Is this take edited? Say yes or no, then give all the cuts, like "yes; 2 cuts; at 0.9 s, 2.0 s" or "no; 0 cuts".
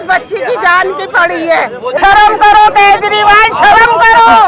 yes; 1 cut; at 1.9 s